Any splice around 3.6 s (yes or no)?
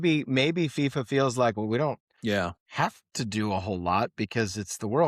no